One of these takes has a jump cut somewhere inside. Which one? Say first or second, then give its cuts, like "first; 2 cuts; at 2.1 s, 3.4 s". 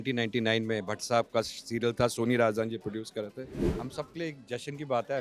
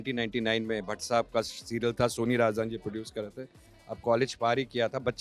first; 1 cut; at 3.6 s